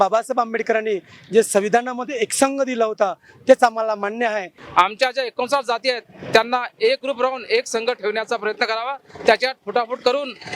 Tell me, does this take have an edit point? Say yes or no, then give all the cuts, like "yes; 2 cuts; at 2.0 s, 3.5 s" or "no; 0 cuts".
yes; 1 cut; at 4.5 s